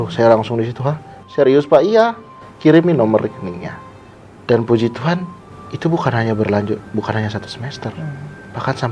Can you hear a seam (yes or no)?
no